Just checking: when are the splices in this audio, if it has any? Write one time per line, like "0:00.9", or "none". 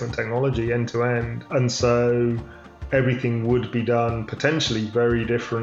none

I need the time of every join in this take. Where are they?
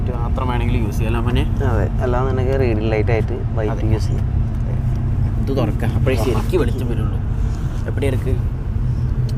none

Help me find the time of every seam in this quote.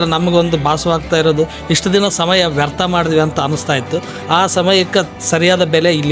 none

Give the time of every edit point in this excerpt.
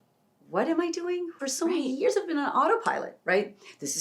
0:01.3

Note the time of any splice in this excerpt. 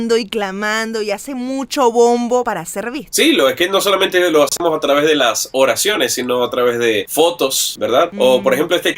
none

